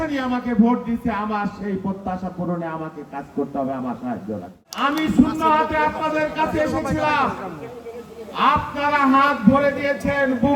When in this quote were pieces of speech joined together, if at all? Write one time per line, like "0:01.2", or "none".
0:04.6

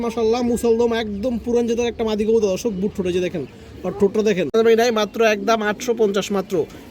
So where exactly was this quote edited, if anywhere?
0:04.5

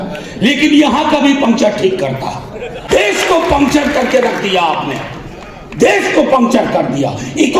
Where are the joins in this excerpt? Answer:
0:02.8

